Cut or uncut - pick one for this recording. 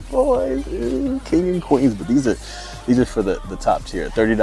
uncut